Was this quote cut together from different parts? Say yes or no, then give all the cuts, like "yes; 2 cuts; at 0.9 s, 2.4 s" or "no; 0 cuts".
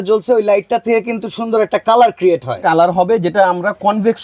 no; 0 cuts